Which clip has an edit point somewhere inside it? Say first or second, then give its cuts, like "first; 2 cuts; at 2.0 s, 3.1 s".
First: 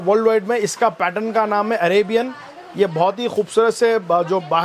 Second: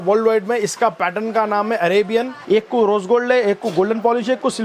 second; 1 cut; at 2.3 s